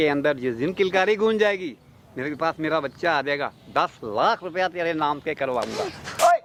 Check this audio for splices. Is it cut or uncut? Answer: uncut